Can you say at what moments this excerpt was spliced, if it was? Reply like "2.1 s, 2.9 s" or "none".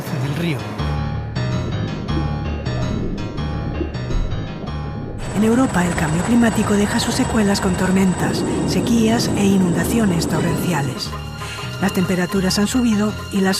5.4 s